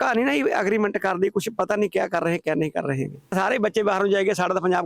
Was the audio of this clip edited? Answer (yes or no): yes